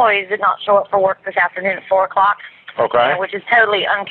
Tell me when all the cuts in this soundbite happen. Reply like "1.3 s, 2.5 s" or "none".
none